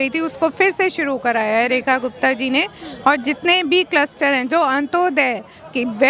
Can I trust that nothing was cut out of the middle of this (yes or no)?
yes